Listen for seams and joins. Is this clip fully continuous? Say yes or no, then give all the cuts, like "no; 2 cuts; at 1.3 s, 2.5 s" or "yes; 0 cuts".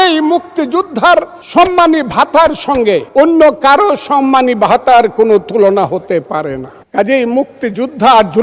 no; 3 cuts; at 1.4 s, 3.1 s, 6.7 s